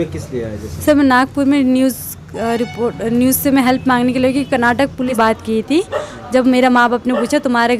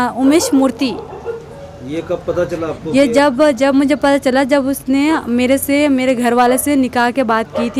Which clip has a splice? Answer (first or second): first